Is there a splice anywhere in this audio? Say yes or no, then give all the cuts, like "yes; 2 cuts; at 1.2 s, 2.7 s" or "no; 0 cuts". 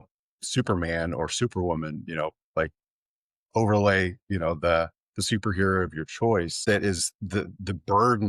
yes; 1 cut; at 6.5 s